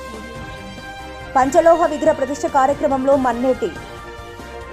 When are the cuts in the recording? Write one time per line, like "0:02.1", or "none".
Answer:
0:01.3